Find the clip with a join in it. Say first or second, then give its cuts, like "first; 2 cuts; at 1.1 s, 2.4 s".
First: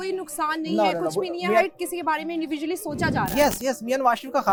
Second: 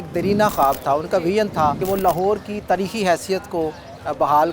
second; 1 cut; at 1.8 s